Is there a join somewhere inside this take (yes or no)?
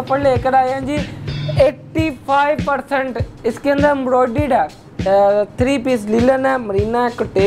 no